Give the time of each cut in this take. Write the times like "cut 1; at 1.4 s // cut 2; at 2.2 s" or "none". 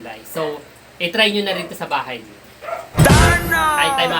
cut 1; at 2.9 s